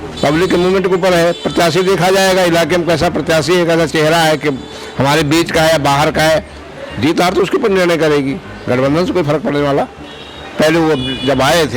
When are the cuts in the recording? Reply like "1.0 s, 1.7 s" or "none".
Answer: 10.1 s